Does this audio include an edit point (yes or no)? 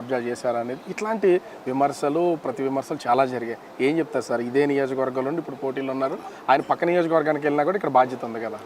no